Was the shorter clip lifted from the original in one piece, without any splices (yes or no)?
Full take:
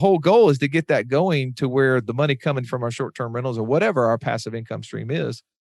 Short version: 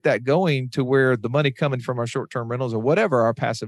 yes